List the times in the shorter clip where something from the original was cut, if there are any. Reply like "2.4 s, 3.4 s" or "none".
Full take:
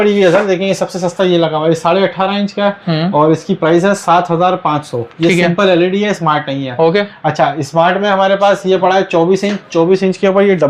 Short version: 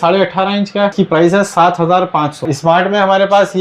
0.9 s, 2.5 s